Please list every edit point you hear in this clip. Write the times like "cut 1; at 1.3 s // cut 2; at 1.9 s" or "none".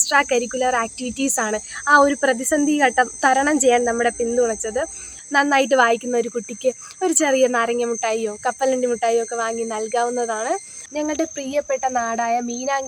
cut 1; at 5.1 s // cut 2; at 10.8 s